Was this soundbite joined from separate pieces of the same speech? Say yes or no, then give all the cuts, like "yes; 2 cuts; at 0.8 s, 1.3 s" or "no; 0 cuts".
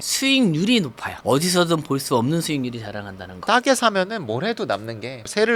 no; 0 cuts